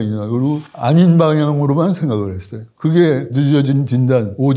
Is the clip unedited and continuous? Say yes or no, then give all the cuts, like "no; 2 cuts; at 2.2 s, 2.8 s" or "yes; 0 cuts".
yes; 0 cuts